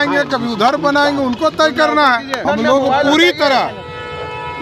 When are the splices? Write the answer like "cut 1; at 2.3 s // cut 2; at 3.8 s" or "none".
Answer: cut 1; at 2.4 s